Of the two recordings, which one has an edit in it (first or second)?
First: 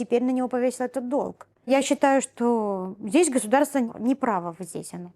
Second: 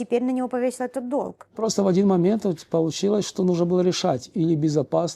second